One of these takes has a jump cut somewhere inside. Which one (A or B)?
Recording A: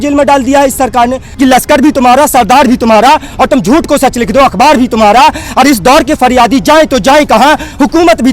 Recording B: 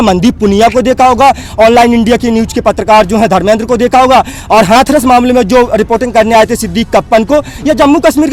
A